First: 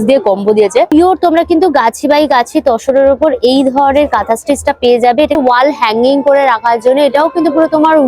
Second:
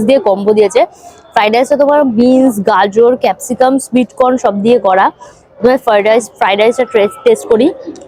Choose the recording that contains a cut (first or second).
first